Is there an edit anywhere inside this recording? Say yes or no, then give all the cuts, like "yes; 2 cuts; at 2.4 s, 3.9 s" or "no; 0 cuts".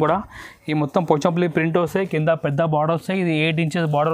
no; 0 cuts